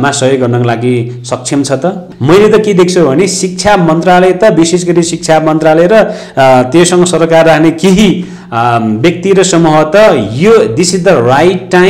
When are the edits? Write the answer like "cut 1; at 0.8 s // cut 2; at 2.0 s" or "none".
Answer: cut 1; at 2.1 s